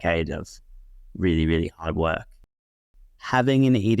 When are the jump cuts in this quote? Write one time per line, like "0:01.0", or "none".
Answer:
0:02.7